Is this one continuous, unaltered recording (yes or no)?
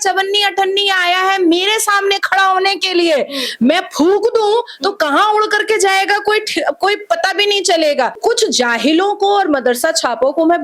no